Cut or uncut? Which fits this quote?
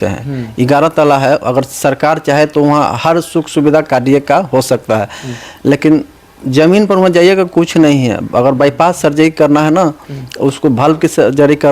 uncut